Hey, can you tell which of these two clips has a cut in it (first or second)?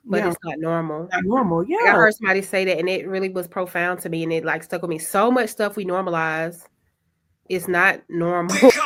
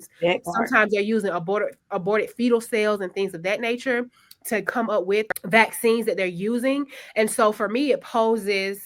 second